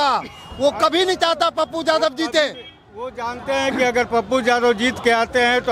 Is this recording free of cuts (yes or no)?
yes